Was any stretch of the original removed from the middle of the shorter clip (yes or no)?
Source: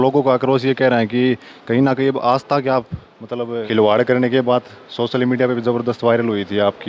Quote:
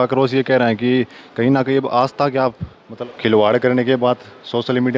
yes